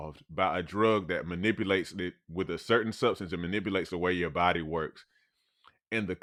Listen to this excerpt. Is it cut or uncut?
uncut